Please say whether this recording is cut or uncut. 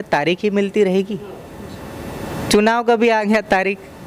uncut